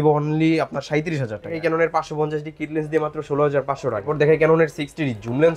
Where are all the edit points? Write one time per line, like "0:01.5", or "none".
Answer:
0:01.6
0:04.1